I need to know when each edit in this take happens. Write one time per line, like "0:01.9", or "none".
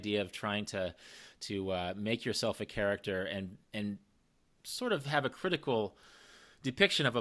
none